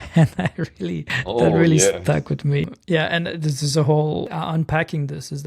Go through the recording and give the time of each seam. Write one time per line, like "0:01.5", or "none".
0:01.1
0:02.6
0:04.3